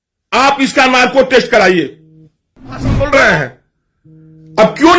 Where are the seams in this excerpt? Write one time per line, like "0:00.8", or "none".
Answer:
0:02.9